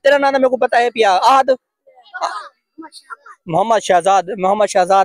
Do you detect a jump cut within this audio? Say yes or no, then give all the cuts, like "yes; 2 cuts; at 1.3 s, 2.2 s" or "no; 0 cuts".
no; 0 cuts